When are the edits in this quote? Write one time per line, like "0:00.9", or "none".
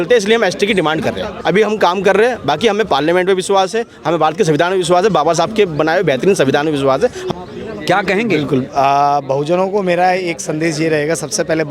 0:01.3
0:07.2